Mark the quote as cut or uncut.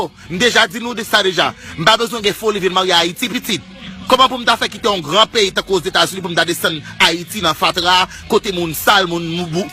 cut